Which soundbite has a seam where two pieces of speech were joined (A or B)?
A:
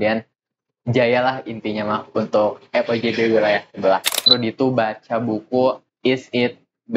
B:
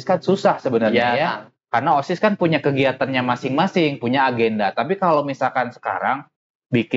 A